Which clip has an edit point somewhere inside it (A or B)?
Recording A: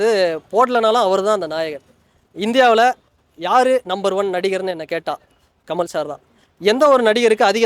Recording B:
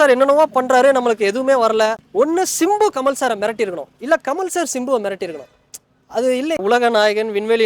B